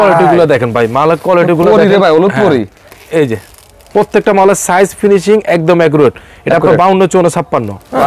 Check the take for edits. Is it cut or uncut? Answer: uncut